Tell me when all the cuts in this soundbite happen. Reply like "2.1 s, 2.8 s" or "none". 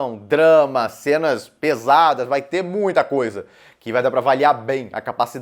none